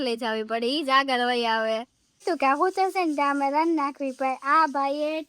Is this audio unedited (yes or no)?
no